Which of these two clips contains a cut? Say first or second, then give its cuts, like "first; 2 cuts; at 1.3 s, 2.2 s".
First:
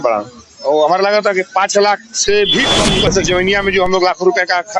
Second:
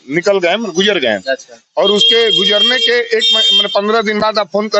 first; 1 cut; at 3.1 s